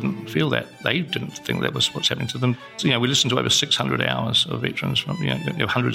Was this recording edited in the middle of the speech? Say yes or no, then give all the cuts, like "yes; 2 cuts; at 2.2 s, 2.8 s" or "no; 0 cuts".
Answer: yes; 2 cuts; at 1.4 s, 2.7 s